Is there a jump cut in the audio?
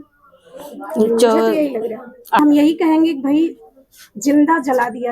yes; 1 cut; at 2.4 s

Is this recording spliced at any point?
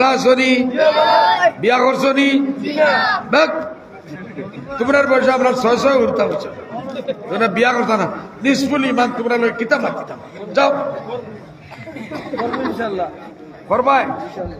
no; 0 cuts

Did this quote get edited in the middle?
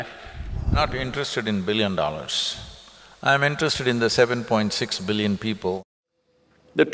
yes; 2 cuts; at 0.7 s, 5.8 s

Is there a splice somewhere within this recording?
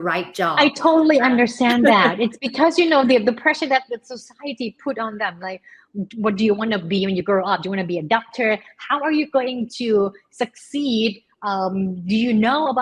no; 0 cuts

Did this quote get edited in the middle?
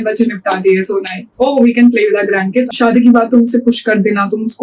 yes; 1 cut; at 2.7 s

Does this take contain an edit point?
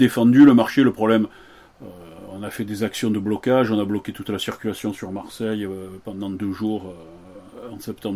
no; 0 cuts

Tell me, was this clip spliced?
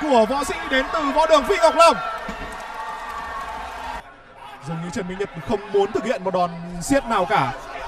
yes; 1 cut; at 4.1 s

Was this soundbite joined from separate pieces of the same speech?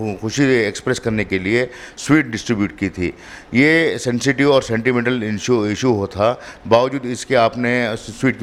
no; 0 cuts

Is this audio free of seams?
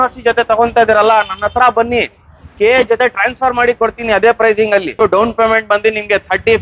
no; 1 cut; at 5.0 s

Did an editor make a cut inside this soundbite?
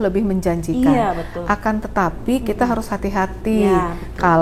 no; 0 cuts

